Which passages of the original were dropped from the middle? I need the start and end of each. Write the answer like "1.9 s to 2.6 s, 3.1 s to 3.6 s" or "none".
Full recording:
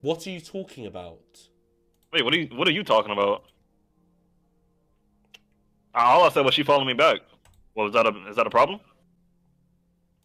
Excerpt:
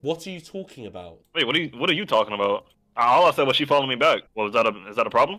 1.2 s to 2.0 s, 3.6 s to 5.8 s, 7.3 s to 7.7 s